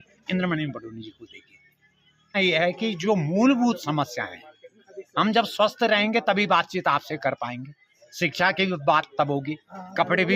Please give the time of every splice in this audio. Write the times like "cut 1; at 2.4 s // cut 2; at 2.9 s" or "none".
cut 1; at 2.3 s